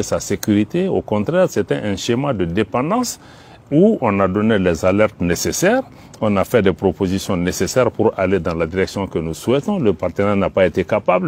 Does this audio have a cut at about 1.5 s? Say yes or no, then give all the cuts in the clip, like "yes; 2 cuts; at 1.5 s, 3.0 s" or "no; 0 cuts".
no; 0 cuts